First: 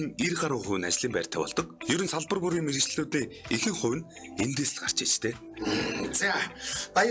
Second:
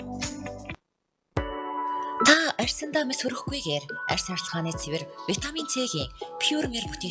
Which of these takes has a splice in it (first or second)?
second